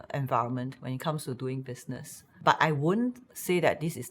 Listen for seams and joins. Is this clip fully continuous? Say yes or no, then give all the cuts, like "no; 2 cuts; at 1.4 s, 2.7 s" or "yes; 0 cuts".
no; 1 cut; at 2.2 s